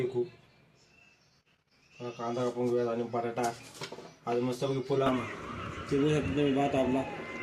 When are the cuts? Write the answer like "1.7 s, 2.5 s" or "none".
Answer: 5.1 s